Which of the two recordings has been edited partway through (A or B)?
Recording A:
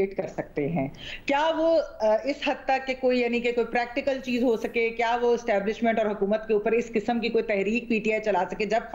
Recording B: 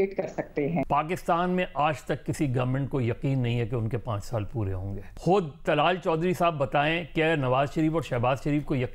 B